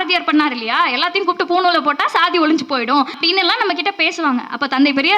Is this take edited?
yes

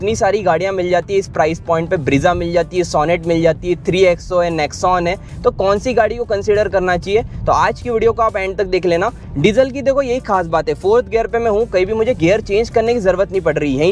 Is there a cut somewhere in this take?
no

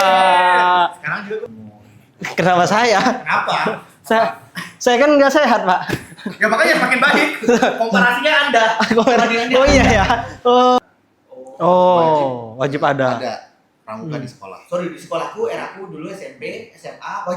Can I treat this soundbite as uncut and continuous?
no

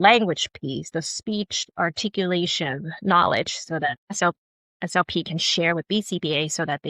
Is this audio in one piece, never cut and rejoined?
no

